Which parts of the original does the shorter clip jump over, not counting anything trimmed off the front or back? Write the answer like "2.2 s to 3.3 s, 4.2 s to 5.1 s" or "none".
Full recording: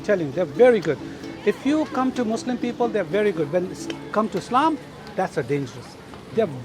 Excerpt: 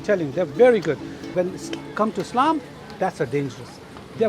1.3 s to 3.5 s